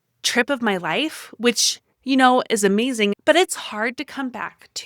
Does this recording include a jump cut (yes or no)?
yes